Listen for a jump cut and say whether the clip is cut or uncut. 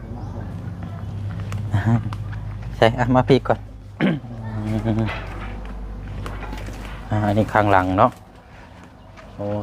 cut